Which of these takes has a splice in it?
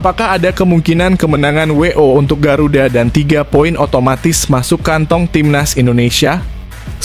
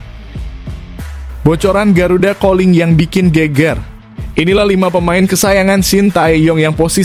second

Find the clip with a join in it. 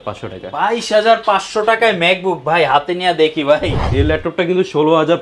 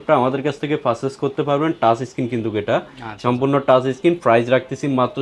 first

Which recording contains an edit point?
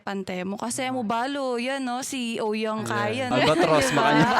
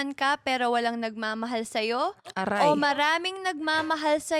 first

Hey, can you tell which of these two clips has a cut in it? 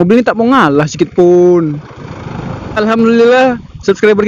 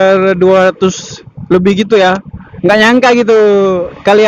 first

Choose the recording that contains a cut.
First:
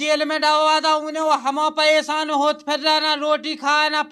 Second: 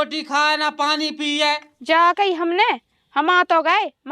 second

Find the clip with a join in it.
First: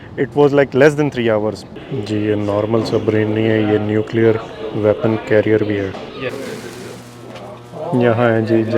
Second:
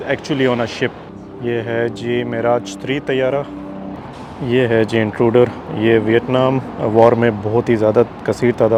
first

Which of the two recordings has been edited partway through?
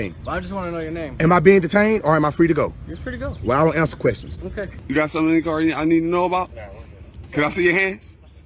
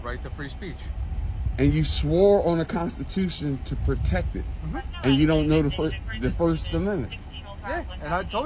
first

